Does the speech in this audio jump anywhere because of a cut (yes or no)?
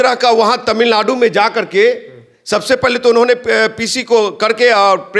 no